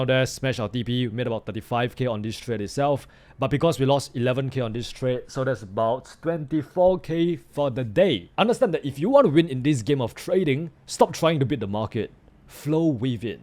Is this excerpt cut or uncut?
cut